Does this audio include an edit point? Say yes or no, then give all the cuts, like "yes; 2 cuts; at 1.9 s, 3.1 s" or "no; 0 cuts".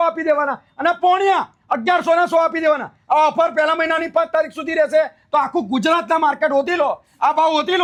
no; 0 cuts